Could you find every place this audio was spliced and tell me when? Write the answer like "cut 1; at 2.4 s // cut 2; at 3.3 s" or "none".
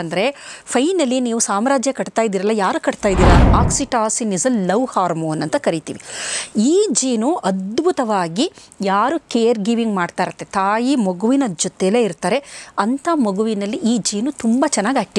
cut 1; at 3.5 s